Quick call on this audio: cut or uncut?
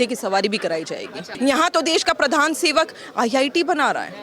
cut